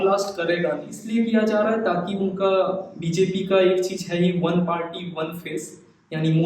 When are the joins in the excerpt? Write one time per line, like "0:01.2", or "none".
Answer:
0:01.0

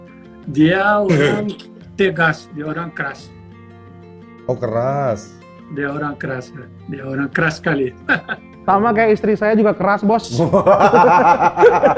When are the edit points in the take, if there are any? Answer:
0:08.7

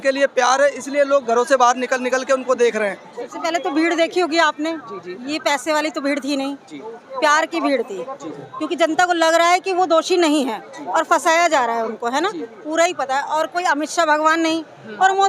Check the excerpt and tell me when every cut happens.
0:03.2

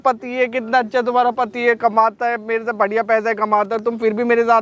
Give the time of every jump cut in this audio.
none

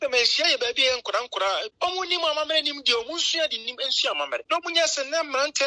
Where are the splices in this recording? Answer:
0:01.7
0:04.4

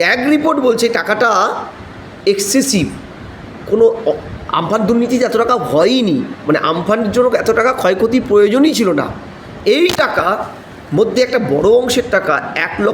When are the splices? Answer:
none

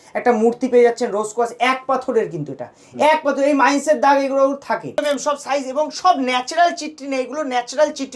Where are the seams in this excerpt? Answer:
0:05.0

